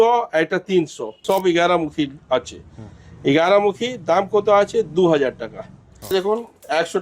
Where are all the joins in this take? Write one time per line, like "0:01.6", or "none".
0:01.2
0:06.1